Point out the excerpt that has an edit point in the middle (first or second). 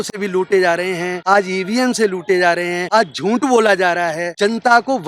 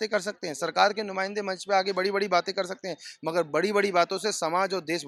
first